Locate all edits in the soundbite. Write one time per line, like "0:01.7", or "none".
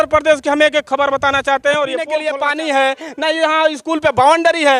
0:02.2